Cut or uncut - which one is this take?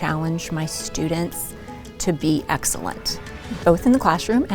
cut